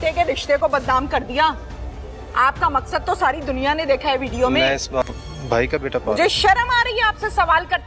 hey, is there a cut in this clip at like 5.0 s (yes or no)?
yes